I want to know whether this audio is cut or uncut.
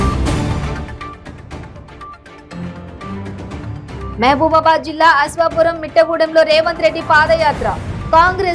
cut